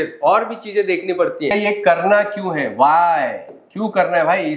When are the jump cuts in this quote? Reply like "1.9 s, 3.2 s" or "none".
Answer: 1.5 s